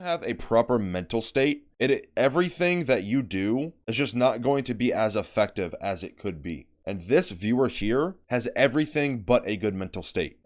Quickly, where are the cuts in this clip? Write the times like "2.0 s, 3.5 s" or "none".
none